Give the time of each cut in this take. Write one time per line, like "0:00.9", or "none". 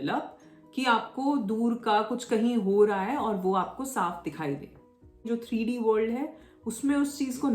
0:05.3